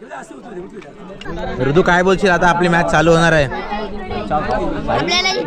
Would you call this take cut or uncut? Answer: cut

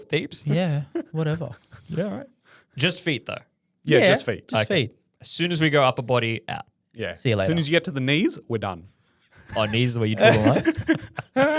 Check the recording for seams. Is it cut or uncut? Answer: uncut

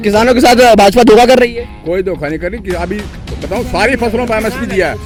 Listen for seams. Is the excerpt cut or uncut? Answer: uncut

